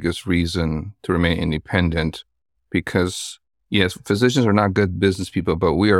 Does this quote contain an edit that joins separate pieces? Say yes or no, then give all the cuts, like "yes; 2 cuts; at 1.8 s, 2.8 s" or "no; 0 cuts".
no; 0 cuts